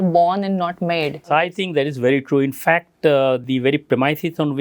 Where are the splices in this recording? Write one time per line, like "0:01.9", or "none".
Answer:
0:01.2
0:03.4